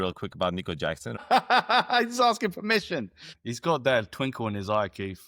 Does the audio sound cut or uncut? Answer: cut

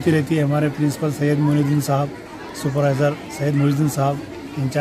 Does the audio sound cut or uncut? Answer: uncut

